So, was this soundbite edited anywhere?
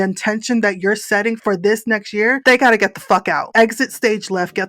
yes; 1 cut; at 3.4 s

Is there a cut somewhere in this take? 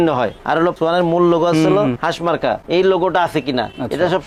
no; 0 cuts

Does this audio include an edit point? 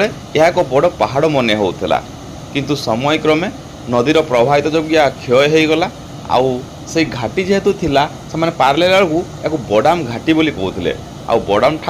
no; 0 cuts

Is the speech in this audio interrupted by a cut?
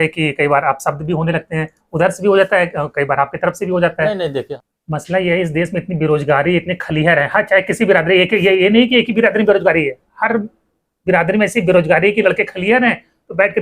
yes; 1 cut; at 4.5 s

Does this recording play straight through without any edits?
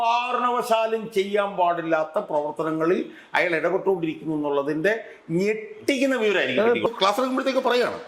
no; 1 cut; at 6.9 s

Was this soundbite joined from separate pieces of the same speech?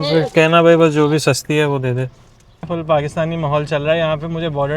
yes; 1 cut; at 2.7 s

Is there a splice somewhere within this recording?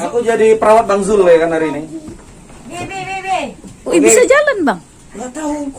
no; 0 cuts

